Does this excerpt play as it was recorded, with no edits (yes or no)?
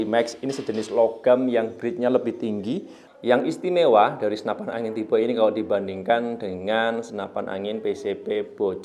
no